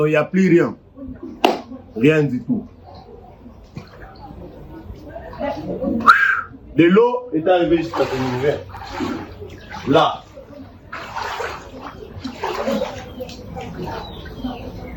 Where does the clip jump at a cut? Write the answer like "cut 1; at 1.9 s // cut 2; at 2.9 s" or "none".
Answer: none